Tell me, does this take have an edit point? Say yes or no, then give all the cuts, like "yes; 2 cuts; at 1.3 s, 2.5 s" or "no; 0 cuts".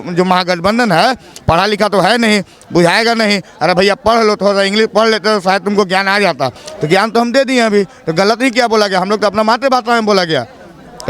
no; 0 cuts